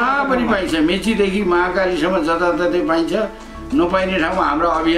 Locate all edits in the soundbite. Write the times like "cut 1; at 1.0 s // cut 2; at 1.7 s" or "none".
none